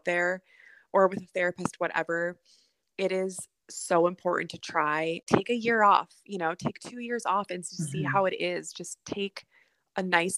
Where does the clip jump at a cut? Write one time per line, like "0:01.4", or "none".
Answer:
0:05.2